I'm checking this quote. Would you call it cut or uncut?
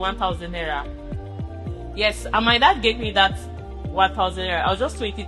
uncut